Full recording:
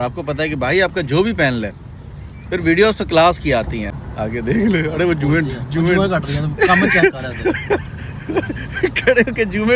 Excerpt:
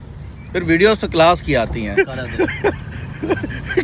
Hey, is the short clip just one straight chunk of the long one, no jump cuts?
no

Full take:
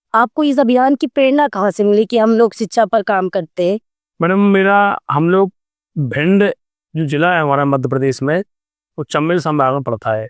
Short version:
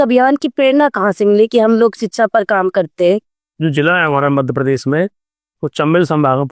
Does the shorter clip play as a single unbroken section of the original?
no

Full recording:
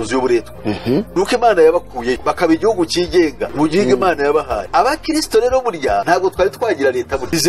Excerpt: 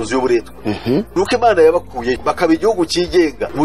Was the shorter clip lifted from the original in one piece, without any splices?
yes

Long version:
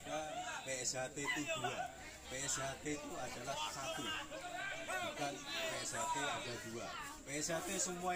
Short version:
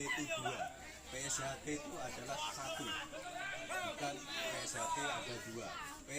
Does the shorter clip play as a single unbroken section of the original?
yes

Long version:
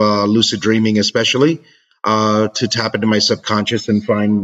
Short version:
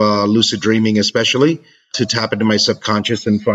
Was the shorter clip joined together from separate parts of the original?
yes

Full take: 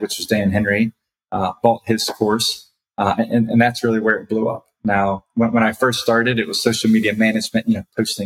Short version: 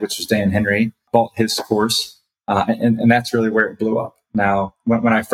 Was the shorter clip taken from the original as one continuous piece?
no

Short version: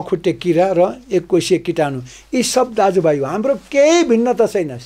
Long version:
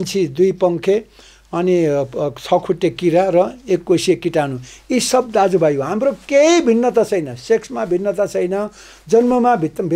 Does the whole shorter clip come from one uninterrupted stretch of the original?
yes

